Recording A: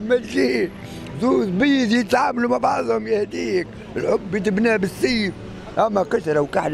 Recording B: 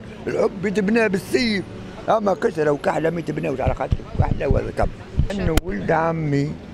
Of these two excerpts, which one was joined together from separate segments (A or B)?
B